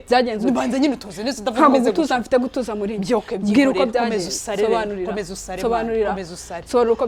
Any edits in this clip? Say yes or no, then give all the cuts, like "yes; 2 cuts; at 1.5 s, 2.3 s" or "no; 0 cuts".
no; 0 cuts